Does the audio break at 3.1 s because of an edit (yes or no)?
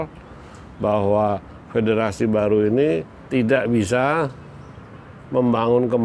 yes